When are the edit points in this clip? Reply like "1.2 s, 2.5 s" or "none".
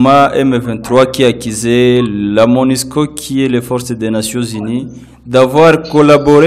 none